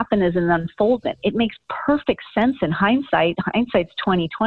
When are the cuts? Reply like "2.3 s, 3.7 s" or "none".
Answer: none